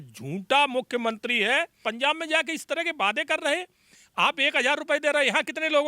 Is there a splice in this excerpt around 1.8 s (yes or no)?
yes